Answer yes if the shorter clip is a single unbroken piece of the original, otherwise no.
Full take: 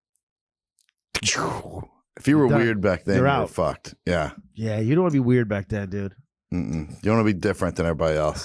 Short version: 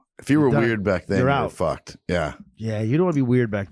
yes